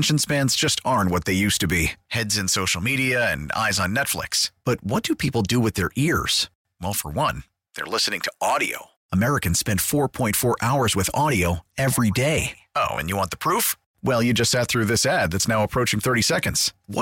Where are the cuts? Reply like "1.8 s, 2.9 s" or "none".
none